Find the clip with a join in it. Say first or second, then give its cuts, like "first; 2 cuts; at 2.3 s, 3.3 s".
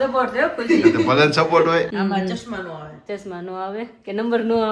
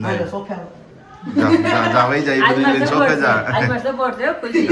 first; 1 cut; at 1.9 s